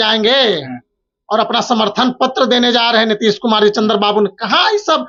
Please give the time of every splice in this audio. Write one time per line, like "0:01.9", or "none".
none